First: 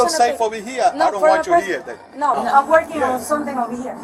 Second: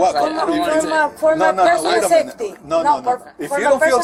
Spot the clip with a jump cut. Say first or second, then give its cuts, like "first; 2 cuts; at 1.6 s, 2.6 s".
first; 1 cut; at 2.4 s